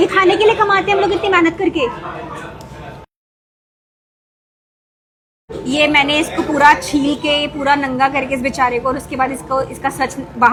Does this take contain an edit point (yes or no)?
no